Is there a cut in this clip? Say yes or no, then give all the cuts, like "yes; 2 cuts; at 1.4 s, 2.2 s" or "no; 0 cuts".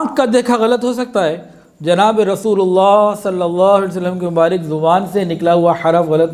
no; 0 cuts